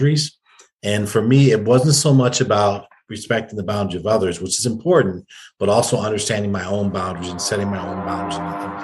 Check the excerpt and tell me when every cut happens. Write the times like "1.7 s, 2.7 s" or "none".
none